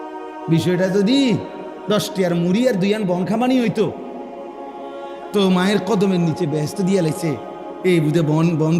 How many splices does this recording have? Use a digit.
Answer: 2